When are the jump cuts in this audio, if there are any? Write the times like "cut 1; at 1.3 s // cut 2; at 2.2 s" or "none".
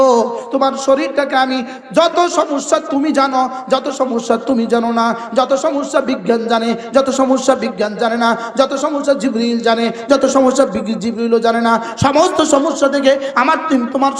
none